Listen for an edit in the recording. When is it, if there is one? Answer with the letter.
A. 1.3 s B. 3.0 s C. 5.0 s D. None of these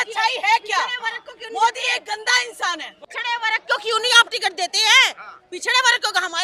D